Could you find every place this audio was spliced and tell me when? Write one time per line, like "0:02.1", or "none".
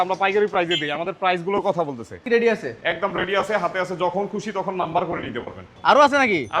0:02.2
0:05.7